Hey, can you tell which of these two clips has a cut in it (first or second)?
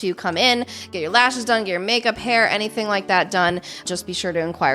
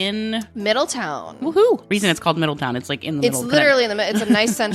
first